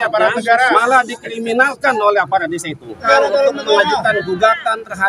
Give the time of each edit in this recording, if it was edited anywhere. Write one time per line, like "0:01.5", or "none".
0:03.0